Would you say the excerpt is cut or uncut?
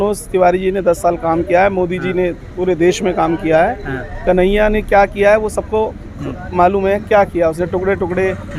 uncut